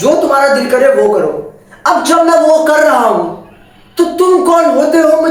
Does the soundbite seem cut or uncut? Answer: uncut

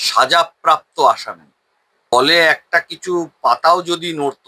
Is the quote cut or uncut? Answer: cut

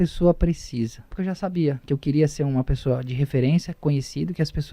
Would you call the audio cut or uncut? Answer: cut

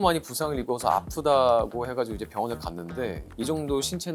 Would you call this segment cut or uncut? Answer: uncut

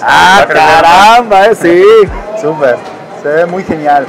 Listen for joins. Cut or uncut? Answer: uncut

